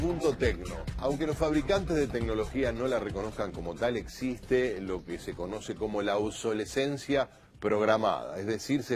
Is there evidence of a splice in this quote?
yes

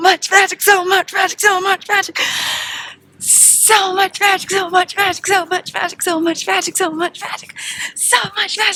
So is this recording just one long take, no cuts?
yes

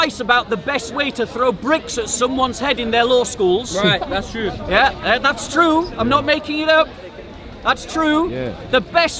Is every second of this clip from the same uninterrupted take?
yes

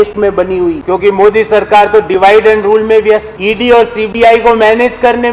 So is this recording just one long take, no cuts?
no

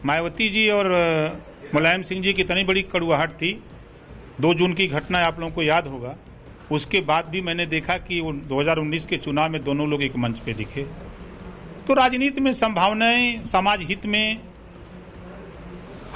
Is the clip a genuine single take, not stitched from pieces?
yes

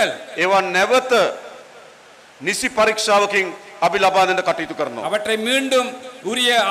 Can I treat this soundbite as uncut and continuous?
yes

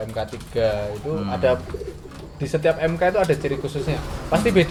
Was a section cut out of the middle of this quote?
no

